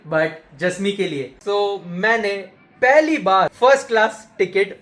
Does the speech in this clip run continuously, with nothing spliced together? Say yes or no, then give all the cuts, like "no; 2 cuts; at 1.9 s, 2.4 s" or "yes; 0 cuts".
no; 2 cuts; at 1.3 s, 3.5 s